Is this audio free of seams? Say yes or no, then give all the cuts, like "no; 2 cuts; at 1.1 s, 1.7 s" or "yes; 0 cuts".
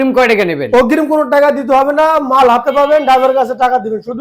yes; 0 cuts